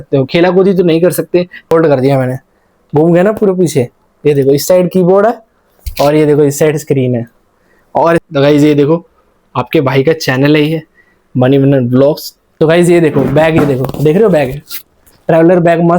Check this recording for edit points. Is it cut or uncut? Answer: cut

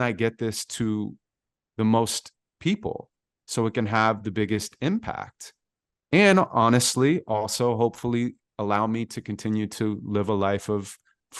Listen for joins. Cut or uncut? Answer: uncut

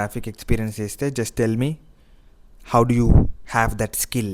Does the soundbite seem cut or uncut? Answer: cut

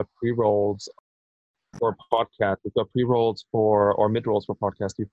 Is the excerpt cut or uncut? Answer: uncut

